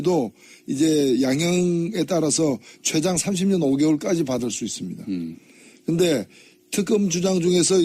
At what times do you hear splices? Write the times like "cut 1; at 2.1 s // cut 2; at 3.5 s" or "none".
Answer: cut 1; at 1.5 s